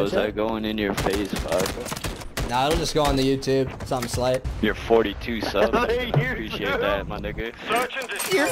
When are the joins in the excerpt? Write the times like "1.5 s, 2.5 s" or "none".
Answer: 2.2 s, 4.2 s